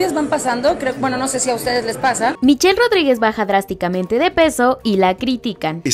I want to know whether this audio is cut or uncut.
uncut